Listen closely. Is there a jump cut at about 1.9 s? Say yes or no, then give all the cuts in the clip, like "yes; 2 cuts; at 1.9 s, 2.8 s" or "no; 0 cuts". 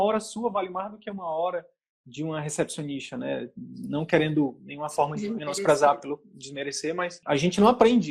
no; 1 cut; at 7.1 s